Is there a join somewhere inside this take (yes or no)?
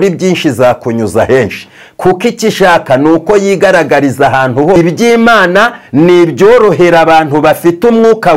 yes